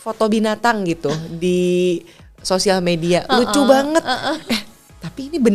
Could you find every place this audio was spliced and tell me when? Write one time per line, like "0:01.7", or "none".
none